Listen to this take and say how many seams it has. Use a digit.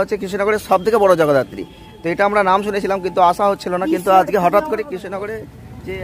0